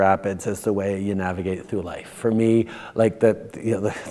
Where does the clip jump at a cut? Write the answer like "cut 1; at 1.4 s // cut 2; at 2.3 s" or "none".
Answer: none